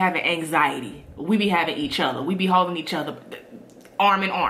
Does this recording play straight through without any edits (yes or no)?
yes